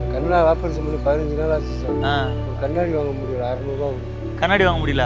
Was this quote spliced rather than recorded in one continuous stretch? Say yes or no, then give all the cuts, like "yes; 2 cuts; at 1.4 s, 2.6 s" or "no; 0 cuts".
no; 0 cuts